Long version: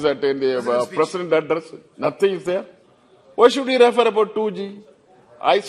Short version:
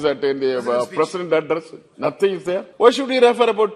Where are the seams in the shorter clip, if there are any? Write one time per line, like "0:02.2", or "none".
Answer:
0:02.7